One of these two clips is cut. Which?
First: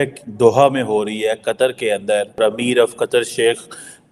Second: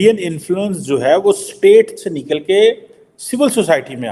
first; 1 cut; at 2.4 s

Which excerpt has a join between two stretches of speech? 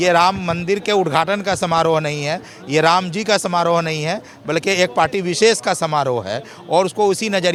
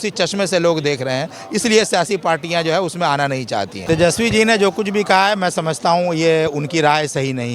second; 1 cut; at 3.7 s

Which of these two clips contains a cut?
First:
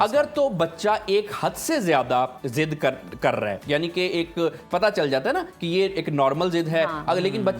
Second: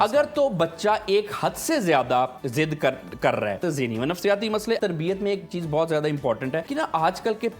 second; 3 cuts; at 3.6 s, 4.8 s, 6.7 s

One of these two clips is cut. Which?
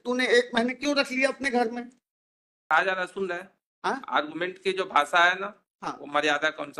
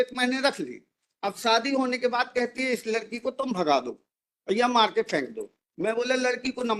first; 1 cut; at 2.7 s

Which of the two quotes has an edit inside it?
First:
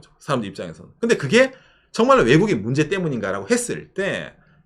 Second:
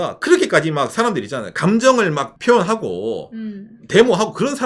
second; 1 cut; at 2.3 s

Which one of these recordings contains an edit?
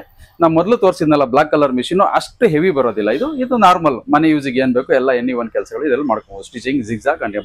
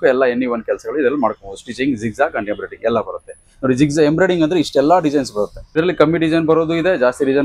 second; 1 cut; at 5.8 s

